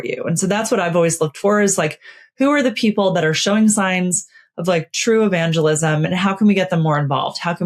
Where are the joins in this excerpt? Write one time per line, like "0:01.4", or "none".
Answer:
none